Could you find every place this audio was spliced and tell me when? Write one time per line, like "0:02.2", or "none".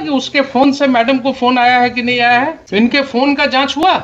0:02.6